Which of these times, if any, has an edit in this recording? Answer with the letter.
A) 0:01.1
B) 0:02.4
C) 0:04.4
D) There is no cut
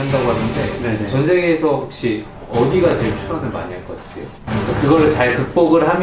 C